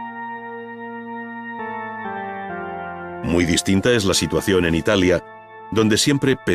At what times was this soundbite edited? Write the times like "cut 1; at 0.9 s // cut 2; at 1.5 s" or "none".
cut 1; at 1.0 s